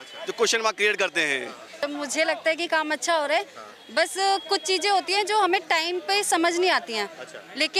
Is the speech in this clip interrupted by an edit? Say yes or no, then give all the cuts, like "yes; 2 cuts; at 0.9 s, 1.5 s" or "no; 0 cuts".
yes; 1 cut; at 1.8 s